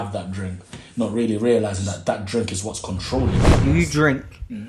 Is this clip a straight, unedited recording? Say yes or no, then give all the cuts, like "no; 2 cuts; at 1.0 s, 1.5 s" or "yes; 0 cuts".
no; 1 cut; at 3.5 s